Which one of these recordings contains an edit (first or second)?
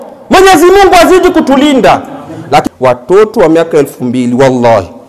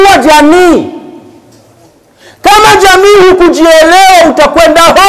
first